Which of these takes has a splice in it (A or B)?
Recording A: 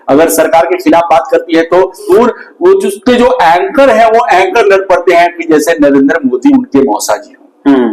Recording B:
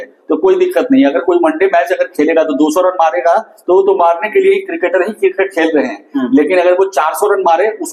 A